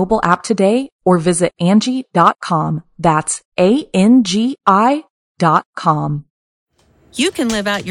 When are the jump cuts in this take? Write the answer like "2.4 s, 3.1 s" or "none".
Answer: 6.5 s